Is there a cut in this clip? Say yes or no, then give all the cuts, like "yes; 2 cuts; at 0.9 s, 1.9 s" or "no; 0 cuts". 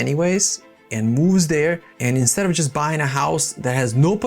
yes; 1 cut; at 1.9 s